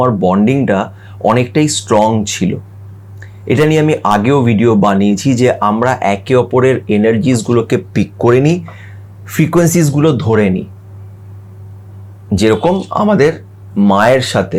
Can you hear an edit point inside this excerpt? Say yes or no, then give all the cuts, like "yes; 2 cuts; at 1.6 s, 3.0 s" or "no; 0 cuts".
no; 0 cuts